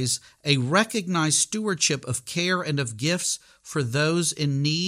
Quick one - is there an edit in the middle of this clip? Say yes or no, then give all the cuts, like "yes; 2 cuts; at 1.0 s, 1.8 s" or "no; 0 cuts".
no; 0 cuts